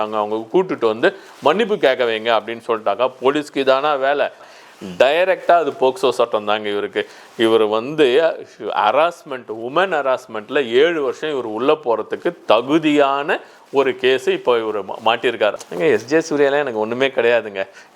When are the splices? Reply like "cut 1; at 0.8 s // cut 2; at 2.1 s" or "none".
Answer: cut 1; at 4.5 s // cut 2; at 15.6 s